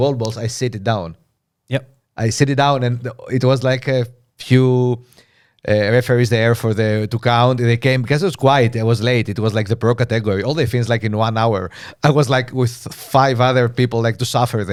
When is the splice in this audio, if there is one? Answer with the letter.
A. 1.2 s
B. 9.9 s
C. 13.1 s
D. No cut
D